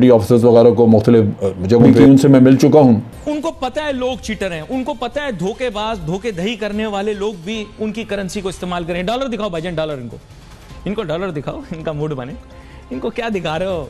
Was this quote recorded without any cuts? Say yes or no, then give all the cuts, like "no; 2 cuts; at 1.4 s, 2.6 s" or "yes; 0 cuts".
no; 2 cuts; at 1.9 s, 3.1 s